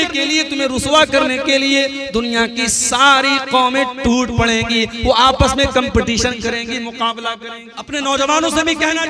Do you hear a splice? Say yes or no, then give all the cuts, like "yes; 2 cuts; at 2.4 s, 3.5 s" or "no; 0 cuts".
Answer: yes; 1 cut; at 7.7 s